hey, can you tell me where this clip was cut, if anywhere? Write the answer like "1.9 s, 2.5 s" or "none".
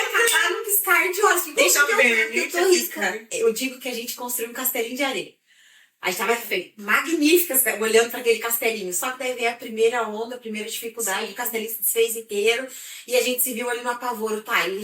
1.5 s, 3.3 s